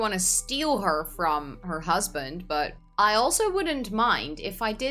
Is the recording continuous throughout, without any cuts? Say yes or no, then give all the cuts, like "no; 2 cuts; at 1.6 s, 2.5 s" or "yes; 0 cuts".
yes; 0 cuts